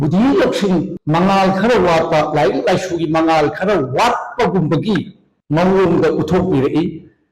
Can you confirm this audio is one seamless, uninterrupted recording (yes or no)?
no